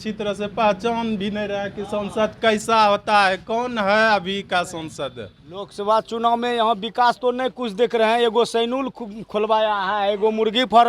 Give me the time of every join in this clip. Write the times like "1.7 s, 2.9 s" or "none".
5.7 s